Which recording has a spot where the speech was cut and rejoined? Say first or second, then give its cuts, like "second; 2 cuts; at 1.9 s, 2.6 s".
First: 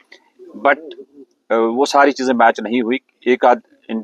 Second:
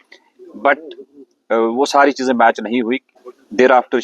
second; 1 cut; at 3.1 s